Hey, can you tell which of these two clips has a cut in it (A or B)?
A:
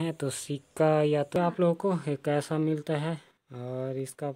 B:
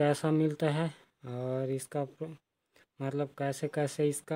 A